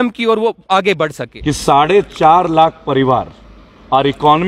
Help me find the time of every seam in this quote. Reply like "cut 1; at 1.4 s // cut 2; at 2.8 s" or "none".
cut 1; at 1.3 s